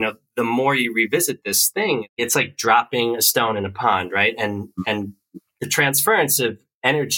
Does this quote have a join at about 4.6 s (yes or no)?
no